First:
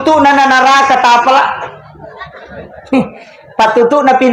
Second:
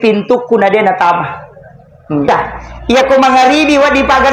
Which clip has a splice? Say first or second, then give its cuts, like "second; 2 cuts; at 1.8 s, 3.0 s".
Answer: second; 1 cut; at 2.3 s